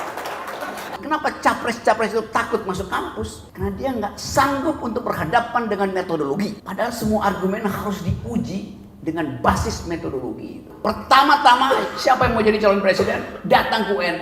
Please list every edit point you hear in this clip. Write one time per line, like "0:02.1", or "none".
0:01.0
0:10.7